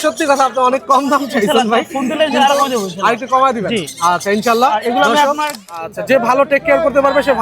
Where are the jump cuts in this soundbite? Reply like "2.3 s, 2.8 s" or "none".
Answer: 5.8 s